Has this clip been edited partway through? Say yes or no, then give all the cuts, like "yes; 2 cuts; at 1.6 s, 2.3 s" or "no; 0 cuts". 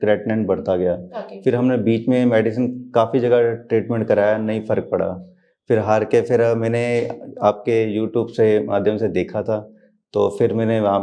no; 0 cuts